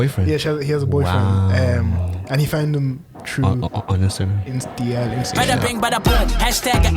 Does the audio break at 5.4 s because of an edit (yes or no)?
yes